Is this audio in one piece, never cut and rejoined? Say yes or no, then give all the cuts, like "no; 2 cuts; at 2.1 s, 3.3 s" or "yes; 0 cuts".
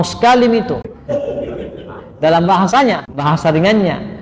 no; 2 cuts; at 0.9 s, 3.2 s